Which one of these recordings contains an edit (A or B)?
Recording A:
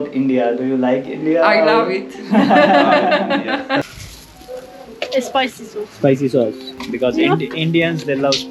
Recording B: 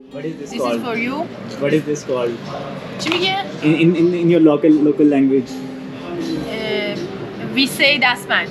A